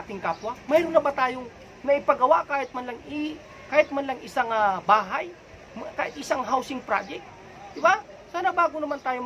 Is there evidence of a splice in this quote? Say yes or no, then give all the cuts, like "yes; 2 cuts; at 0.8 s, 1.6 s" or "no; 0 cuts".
no; 0 cuts